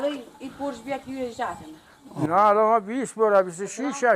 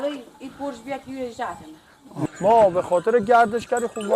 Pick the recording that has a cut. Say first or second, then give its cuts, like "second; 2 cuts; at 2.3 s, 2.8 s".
second; 1 cut; at 2.2 s